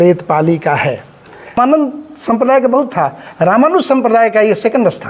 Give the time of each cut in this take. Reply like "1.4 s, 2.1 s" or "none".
1.5 s